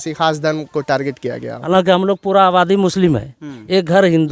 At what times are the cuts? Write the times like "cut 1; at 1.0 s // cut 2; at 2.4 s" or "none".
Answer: cut 1; at 1.6 s